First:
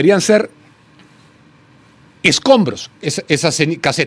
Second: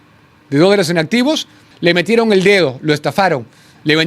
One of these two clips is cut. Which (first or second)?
second